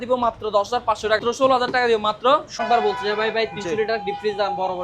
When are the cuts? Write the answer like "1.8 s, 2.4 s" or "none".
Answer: 1.2 s, 2.6 s